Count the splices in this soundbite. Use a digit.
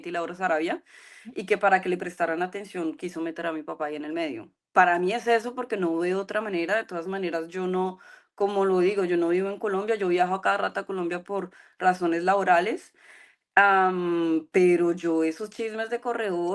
0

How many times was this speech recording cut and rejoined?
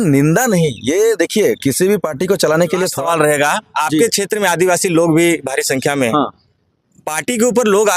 1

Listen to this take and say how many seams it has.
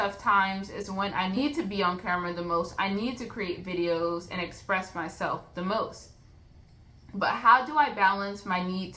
1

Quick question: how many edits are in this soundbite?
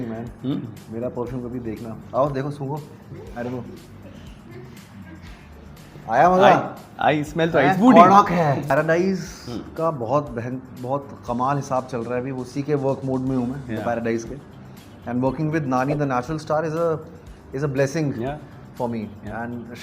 1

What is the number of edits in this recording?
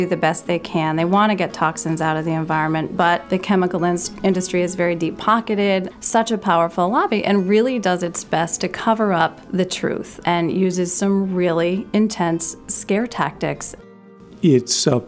4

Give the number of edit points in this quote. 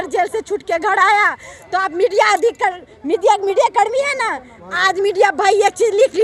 0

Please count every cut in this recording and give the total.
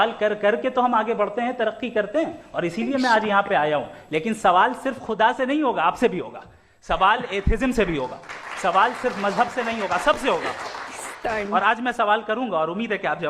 0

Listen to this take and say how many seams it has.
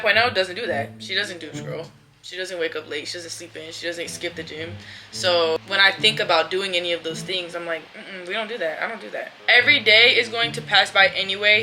2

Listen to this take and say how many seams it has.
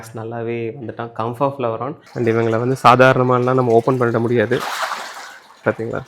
1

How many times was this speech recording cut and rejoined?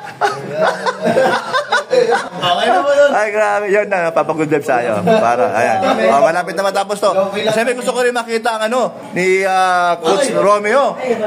1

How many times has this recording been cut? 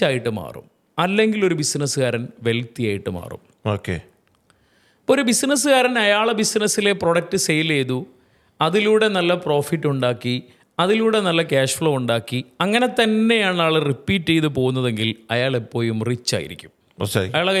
0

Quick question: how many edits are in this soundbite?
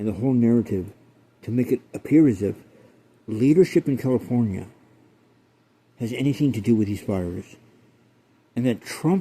0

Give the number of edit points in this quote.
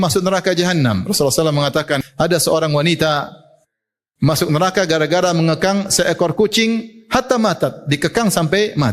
1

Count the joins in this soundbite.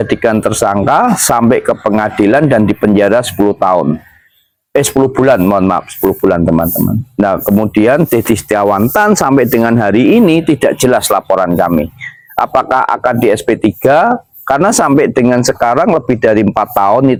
0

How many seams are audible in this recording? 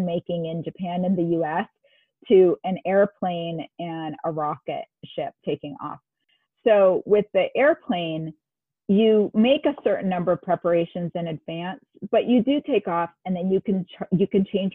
0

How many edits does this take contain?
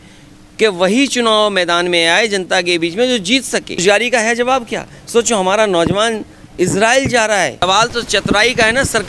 2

